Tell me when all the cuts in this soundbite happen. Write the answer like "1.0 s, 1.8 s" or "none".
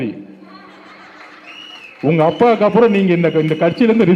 none